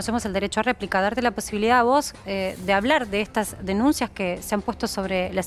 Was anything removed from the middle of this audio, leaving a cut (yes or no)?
no